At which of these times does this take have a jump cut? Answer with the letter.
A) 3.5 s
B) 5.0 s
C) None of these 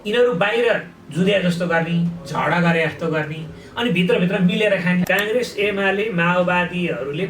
B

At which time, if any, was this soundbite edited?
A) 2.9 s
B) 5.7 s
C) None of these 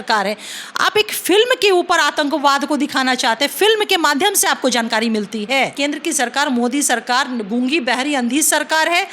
B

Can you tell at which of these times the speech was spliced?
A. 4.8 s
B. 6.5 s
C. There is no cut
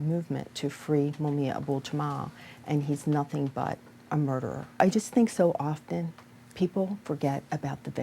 A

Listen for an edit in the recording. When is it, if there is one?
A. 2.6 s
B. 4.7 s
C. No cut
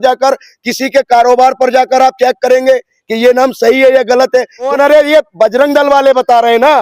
B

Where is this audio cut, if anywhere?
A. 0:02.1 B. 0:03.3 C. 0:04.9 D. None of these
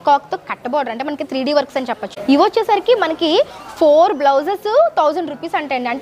A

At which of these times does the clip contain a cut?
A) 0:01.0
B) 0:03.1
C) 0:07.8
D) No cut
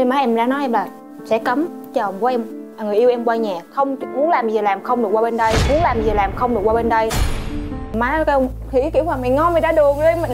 C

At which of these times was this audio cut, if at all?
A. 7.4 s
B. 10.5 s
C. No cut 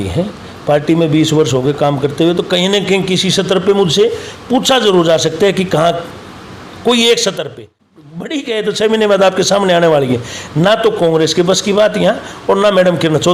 A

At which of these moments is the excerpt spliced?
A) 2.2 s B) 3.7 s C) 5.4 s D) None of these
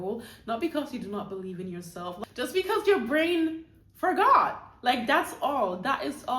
A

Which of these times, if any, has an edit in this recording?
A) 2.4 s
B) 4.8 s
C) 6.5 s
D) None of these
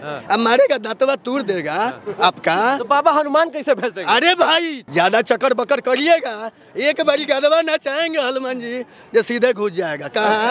B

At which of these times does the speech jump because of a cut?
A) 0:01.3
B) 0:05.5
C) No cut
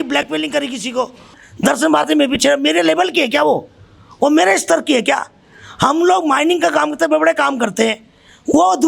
A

